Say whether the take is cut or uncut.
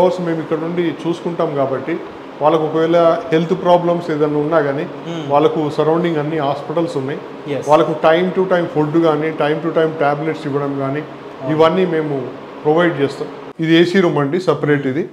cut